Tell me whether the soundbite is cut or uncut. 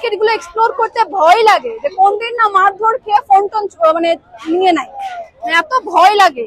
uncut